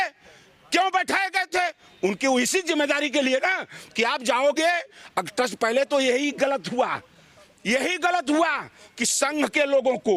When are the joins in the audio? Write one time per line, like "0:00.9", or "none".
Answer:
none